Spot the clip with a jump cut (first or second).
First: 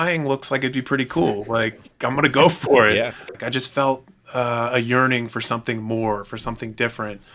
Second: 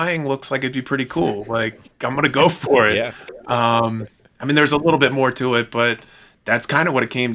first